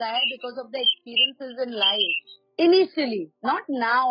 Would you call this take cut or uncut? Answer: cut